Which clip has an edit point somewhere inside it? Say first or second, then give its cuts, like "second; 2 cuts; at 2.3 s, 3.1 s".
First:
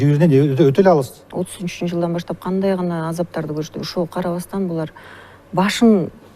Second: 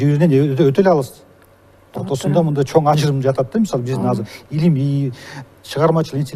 first; 1 cut; at 1.2 s